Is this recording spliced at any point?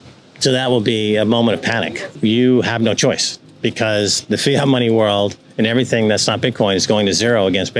yes; 1 cut; at 2.1 s

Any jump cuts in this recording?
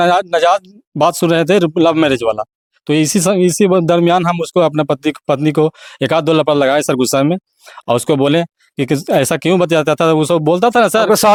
no; 0 cuts

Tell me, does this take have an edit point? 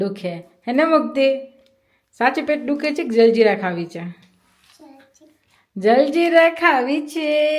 no; 0 cuts

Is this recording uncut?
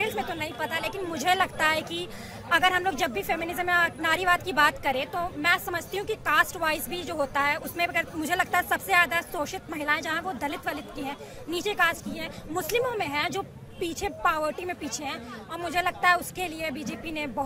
yes; 0 cuts

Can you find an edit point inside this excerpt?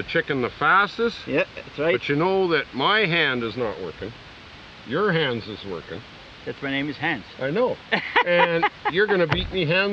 no; 0 cuts

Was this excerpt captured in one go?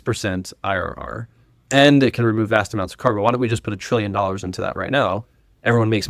yes; 0 cuts

